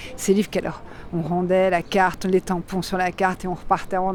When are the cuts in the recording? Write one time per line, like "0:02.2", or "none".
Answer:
none